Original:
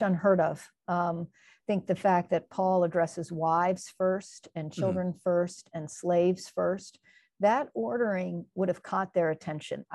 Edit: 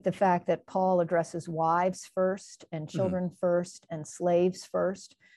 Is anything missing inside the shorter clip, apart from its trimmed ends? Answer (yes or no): no